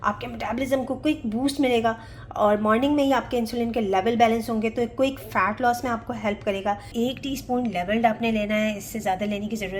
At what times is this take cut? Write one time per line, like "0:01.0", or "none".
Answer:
0:06.9